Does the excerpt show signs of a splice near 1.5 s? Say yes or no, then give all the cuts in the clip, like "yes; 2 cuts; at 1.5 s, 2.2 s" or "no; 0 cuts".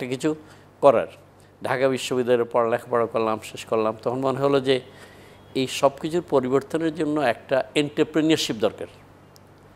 no; 0 cuts